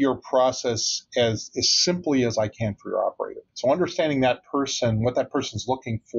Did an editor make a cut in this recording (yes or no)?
yes